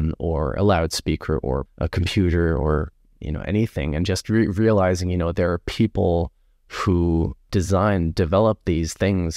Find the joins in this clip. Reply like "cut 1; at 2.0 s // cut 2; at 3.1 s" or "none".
cut 1; at 1.7 s